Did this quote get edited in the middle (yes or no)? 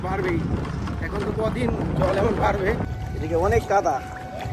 yes